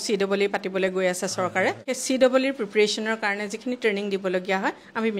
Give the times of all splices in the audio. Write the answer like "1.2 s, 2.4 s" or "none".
1.9 s